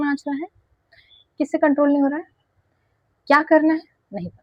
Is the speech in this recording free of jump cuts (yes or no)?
yes